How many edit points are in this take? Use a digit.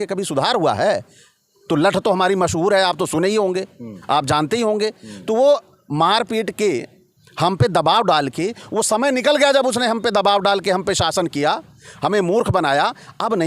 0